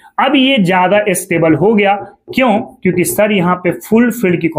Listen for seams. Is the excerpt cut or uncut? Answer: uncut